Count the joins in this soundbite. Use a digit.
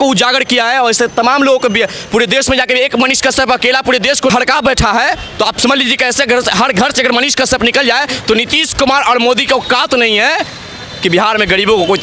1